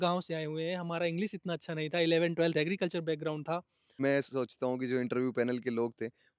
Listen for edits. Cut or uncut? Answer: cut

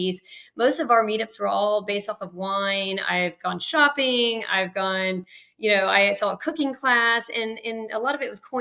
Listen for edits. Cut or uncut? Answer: uncut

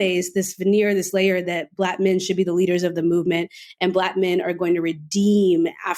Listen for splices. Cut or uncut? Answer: uncut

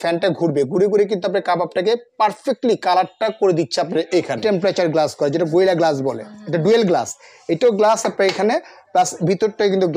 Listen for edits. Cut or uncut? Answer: cut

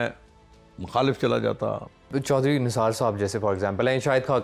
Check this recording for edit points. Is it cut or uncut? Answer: cut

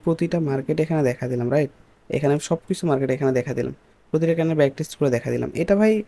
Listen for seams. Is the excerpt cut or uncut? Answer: uncut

